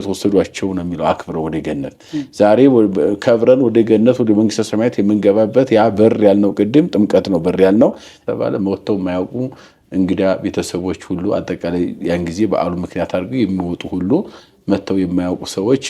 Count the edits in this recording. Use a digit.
1